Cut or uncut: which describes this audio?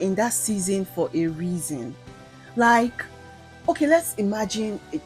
uncut